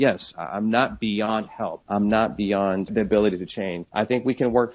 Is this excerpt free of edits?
no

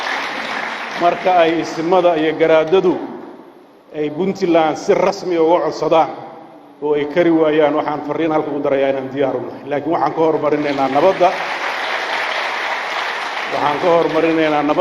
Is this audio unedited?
yes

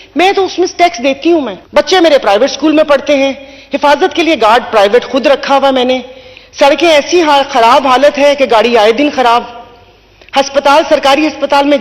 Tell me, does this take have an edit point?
yes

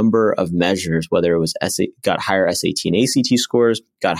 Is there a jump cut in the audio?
no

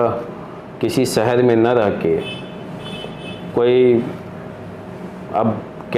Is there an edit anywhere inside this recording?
no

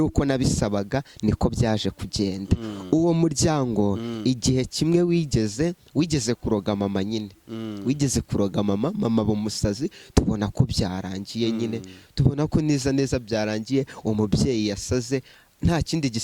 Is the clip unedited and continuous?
yes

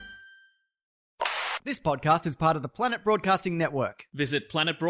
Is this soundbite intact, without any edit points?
no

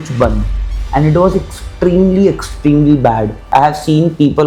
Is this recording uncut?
no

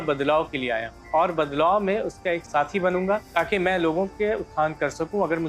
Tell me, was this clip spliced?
yes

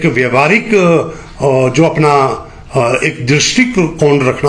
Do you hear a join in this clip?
no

